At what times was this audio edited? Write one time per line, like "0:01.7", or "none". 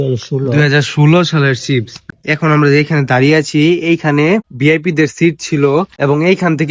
0:02.1
0:04.5
0:05.9